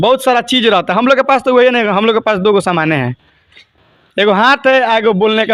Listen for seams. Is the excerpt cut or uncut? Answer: uncut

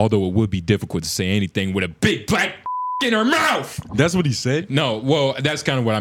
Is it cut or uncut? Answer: uncut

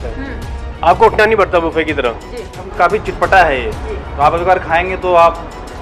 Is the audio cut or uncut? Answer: cut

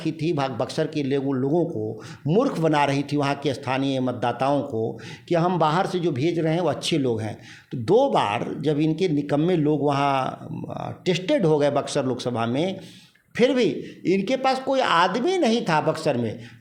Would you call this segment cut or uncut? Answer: uncut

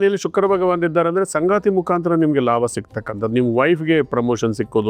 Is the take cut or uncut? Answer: uncut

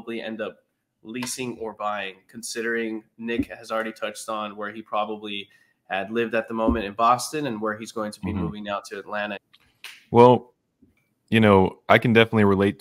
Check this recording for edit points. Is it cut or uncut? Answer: cut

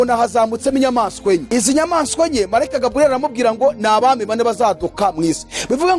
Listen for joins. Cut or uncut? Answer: cut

